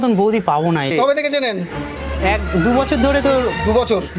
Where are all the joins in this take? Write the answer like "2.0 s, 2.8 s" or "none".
0.9 s